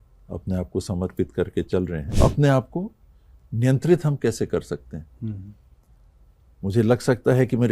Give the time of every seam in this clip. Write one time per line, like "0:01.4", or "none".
0:02.1